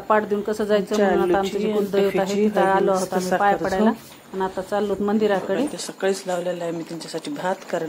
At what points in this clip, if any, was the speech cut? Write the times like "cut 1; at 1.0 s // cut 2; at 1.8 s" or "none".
cut 1; at 5.8 s